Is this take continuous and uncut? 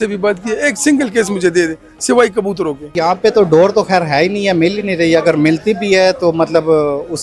no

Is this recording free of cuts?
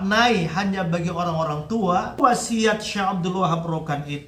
no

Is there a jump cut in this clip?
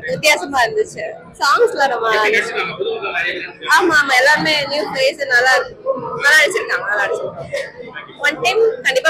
no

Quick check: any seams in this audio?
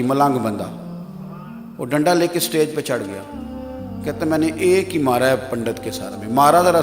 no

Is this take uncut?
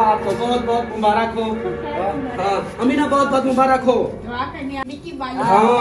no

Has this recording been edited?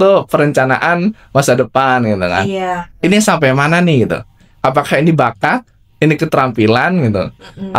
no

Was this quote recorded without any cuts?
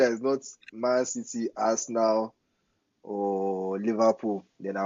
yes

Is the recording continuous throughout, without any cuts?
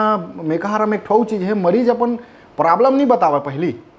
yes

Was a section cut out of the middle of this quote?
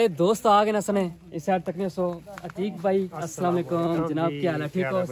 no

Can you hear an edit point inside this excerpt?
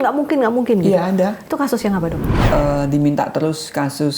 yes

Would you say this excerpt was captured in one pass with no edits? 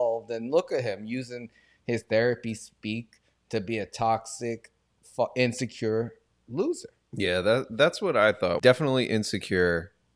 no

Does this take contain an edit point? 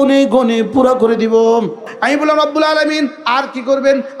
yes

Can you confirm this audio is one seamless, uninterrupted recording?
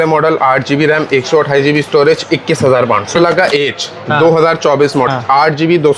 no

